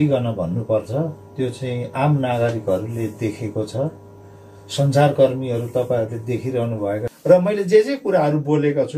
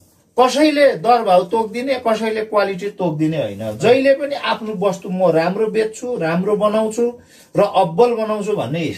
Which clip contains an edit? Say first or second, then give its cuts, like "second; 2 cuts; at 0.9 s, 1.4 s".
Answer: first; 1 cut; at 7.1 s